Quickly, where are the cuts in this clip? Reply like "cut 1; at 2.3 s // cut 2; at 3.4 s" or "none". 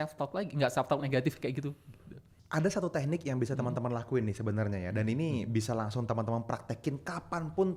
none